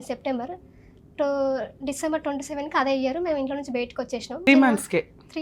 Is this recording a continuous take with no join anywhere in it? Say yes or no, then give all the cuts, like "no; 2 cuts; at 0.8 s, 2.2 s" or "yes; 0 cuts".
no; 1 cut; at 4.5 s